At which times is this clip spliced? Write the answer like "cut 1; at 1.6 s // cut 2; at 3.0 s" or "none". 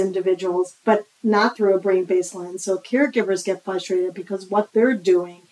none